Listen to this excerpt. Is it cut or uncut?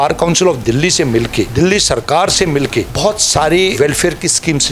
cut